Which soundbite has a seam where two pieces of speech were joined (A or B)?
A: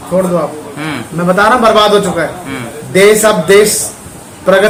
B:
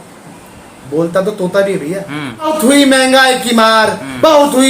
B